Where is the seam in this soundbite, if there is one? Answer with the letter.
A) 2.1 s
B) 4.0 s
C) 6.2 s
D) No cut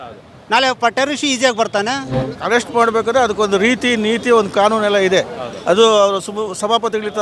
A